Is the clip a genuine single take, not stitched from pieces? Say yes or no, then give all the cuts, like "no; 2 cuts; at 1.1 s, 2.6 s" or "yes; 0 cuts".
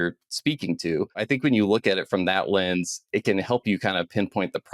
no; 1 cut; at 1.2 s